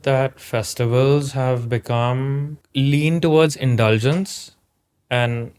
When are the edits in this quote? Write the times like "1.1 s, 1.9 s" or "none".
2.6 s